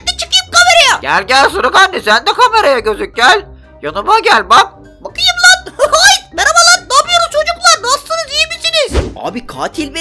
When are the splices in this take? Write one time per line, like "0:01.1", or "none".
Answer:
0:01.0
0:09.0